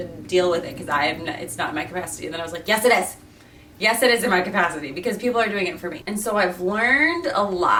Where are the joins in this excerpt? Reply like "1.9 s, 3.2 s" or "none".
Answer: none